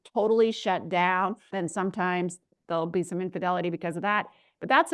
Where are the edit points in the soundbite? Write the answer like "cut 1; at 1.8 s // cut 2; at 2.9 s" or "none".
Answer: cut 1; at 1.5 s